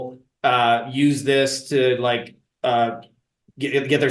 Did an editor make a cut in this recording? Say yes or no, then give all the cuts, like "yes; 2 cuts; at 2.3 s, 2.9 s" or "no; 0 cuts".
no; 0 cuts